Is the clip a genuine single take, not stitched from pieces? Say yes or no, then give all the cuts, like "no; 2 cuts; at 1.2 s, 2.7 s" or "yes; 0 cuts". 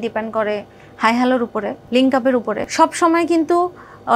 no; 2 cuts; at 1.8 s, 2.6 s